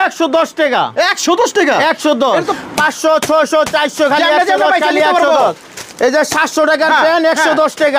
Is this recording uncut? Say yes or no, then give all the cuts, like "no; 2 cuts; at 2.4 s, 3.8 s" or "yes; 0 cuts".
no; 1 cut; at 2.5 s